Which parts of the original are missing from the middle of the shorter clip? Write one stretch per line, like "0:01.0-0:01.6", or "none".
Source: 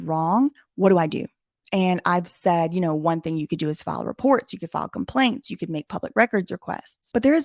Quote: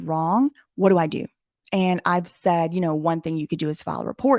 none